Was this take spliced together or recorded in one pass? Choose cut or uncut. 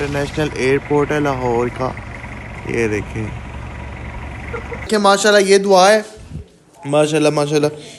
cut